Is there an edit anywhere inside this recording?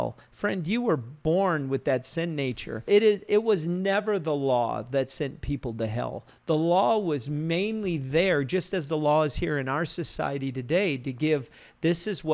yes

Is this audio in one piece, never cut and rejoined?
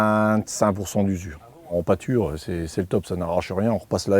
no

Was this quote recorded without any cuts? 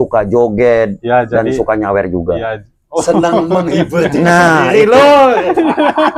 yes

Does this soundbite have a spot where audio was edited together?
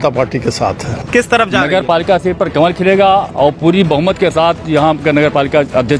yes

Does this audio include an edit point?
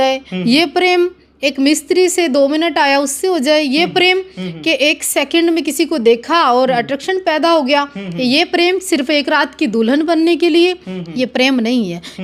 no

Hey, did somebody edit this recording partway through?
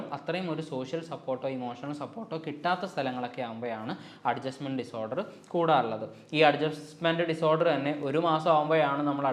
no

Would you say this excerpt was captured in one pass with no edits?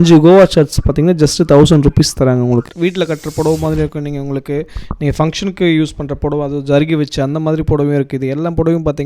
no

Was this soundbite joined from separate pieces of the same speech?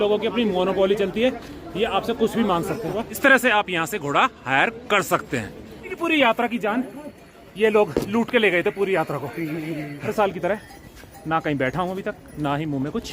yes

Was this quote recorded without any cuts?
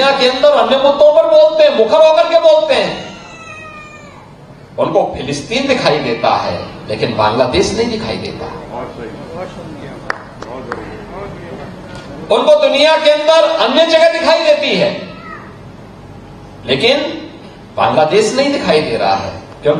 yes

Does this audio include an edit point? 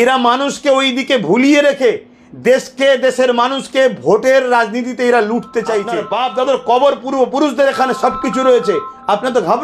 yes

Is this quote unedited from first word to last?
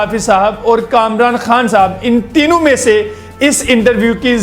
yes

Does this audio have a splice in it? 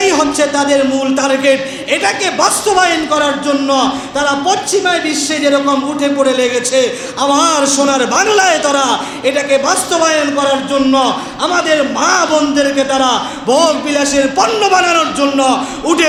no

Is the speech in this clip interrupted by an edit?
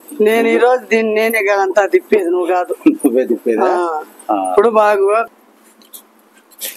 yes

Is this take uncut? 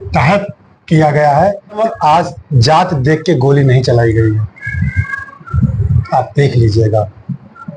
no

